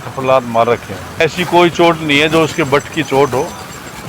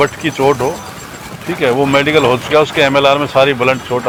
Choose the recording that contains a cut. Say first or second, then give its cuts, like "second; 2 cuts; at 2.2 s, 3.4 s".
first; 1 cut; at 1.2 s